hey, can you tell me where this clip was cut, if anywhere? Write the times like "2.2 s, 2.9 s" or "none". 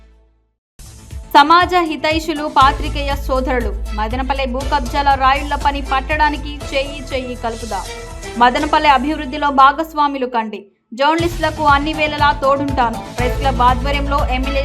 1.0 s